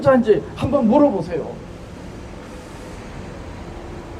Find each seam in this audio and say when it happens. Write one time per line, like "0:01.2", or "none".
none